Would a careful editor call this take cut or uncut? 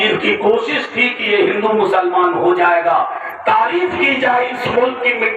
uncut